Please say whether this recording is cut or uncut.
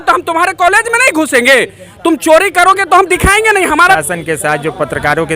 cut